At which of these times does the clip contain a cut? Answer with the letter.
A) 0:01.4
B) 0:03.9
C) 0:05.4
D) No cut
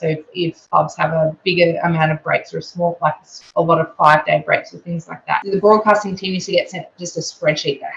C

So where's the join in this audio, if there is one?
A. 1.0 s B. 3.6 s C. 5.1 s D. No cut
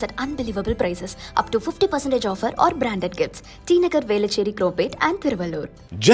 D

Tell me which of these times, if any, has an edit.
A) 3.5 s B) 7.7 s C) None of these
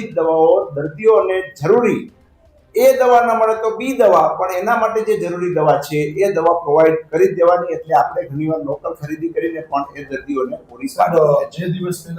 C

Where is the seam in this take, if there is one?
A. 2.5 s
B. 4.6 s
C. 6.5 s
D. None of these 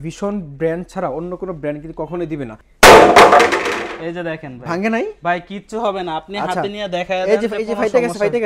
A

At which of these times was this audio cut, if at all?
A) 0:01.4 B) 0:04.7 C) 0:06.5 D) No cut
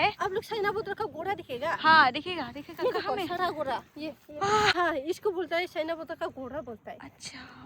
B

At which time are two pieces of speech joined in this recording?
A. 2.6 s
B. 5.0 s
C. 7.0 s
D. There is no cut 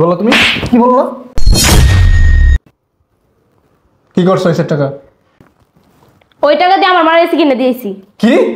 A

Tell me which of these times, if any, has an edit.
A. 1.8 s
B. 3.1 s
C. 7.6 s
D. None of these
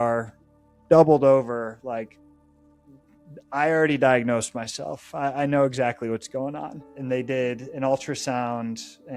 D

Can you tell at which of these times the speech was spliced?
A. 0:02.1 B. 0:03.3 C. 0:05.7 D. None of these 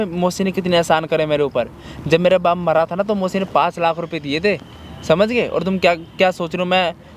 D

